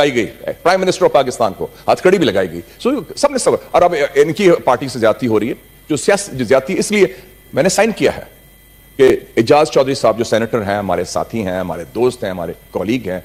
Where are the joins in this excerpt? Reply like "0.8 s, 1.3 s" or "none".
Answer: none